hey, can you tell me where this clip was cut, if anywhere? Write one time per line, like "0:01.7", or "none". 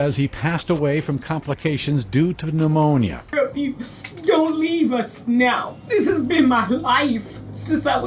0:03.3